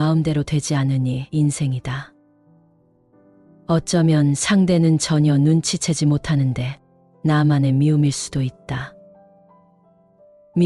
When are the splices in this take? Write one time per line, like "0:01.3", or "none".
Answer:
none